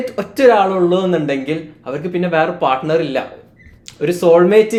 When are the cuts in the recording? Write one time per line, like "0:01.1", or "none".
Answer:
none